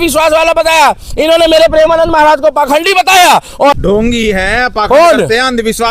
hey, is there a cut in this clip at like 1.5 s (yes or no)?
no